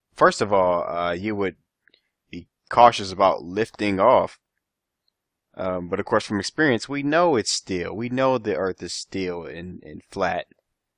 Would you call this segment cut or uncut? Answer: cut